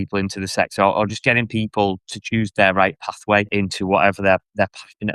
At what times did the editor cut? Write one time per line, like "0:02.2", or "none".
0:02.1
0:03.5